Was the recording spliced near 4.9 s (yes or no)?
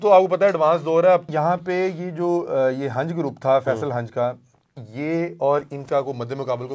no